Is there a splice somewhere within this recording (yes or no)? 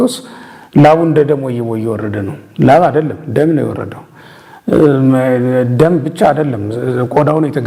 no